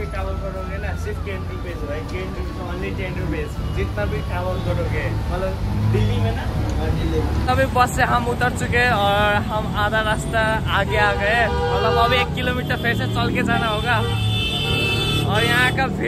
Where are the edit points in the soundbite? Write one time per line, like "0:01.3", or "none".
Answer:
none